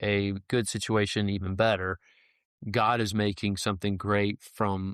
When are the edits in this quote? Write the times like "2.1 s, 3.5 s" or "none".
none